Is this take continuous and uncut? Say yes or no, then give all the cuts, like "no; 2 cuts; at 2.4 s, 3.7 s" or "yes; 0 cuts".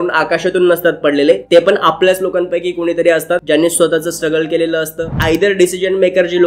no; 2 cuts; at 3.4 s, 5.1 s